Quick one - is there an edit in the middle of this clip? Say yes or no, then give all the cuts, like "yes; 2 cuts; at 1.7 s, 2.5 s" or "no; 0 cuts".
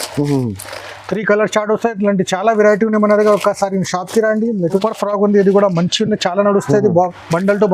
yes; 1 cut; at 4.7 s